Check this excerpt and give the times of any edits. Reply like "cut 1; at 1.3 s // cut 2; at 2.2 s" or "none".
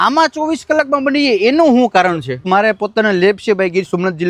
cut 1; at 2.4 s